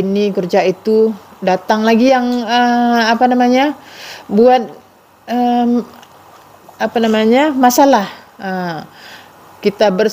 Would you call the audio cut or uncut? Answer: uncut